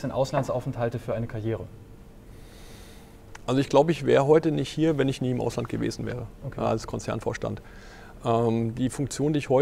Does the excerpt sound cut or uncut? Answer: uncut